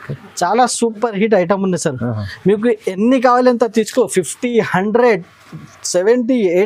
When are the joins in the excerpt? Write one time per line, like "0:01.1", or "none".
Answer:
none